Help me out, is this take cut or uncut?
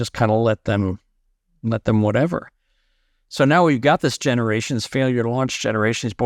uncut